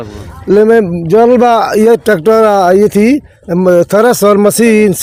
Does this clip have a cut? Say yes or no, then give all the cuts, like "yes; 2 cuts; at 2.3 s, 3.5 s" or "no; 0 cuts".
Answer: no; 0 cuts